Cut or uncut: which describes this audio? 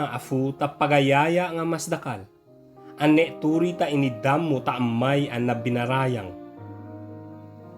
cut